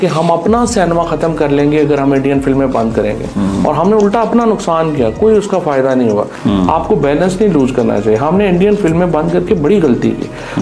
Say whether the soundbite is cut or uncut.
uncut